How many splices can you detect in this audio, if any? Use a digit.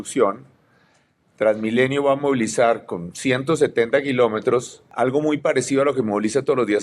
1